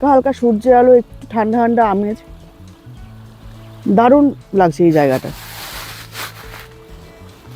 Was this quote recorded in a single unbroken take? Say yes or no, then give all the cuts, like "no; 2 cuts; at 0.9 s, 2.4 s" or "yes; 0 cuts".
yes; 0 cuts